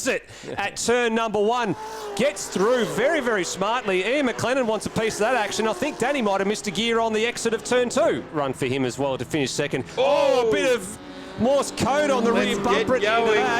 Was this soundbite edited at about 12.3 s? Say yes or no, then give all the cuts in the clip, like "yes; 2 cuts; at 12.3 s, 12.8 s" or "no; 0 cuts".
no; 1 cut; at 8.3 s